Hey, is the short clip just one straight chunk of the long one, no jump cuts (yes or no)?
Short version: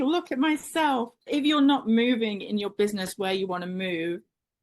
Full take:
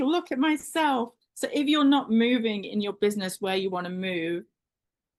no